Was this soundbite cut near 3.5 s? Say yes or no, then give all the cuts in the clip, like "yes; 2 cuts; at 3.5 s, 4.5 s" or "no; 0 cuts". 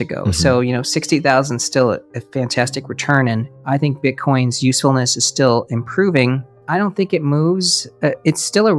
yes; 1 cut; at 3.5 s